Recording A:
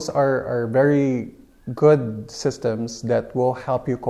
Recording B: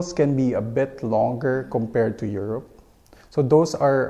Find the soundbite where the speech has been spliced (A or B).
B